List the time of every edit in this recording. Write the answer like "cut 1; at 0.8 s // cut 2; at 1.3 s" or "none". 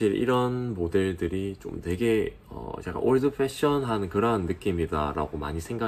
none